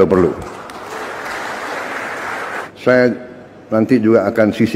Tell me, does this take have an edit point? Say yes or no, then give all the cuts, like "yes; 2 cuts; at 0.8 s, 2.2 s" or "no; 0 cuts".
yes; 1 cut; at 2.7 s